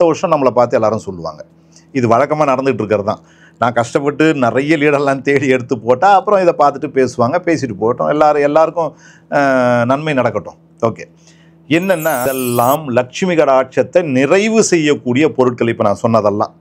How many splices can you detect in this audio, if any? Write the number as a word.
one